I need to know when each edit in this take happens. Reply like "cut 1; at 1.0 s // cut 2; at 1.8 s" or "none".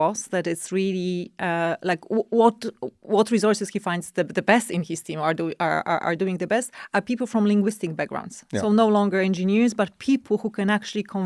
none